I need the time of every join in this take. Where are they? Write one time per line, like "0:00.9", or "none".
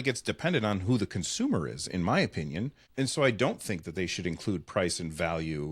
0:02.8